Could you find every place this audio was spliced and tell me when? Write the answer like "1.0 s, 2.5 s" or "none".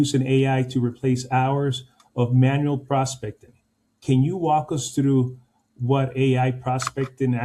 none